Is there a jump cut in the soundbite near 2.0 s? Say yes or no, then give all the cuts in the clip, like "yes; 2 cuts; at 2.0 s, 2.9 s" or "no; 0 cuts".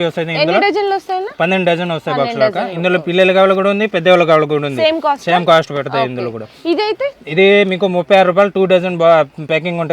no; 0 cuts